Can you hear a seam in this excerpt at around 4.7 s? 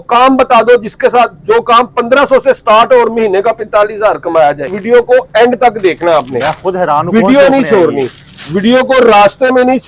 yes; 1 cut; at 4.7 s

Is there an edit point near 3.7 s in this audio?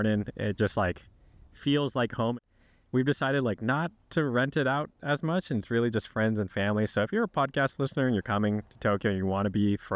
no; 1 cut; at 2.4 s

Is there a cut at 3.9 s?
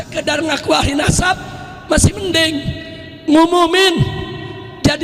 no; 0 cuts

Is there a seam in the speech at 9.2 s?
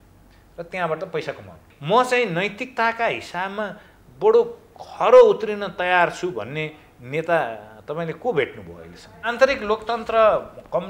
yes; 2 cuts; at 1.6 s, 9.2 s

